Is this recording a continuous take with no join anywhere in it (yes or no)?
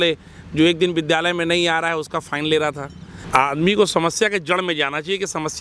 no